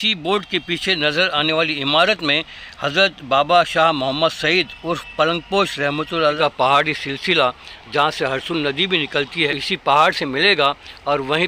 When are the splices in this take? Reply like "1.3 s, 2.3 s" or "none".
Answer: 6.4 s, 9.6 s